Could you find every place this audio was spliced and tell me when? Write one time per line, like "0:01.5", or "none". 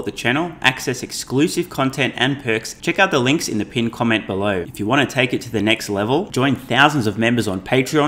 0:02.7
0:04.7